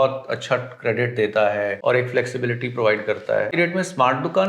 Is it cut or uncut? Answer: cut